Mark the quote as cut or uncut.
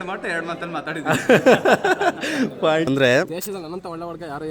cut